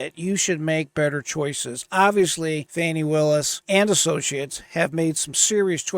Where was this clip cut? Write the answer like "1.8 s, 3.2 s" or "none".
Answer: 2.7 s, 3.6 s